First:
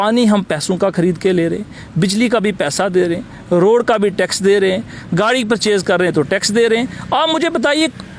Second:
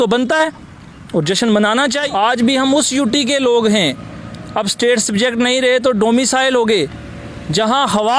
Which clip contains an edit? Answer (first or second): second